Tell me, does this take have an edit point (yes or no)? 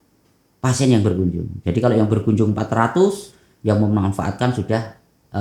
no